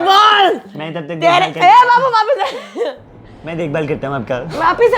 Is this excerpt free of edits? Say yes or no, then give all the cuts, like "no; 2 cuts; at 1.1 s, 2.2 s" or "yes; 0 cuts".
yes; 0 cuts